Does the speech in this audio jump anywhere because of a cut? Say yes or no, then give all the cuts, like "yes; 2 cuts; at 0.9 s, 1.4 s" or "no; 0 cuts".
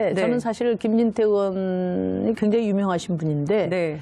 no; 0 cuts